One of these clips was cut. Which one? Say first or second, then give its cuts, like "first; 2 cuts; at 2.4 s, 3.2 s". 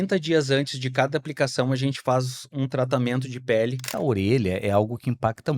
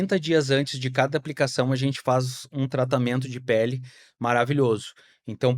first; 1 cut; at 3.9 s